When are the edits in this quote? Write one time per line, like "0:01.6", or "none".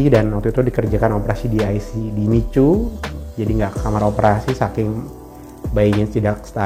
none